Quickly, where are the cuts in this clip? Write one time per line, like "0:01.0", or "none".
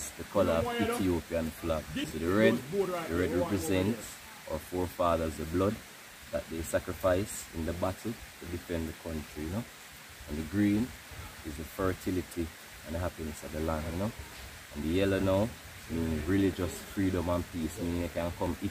0:02.0